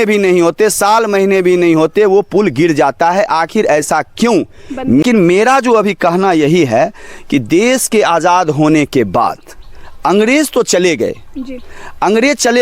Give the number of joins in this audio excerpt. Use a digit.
1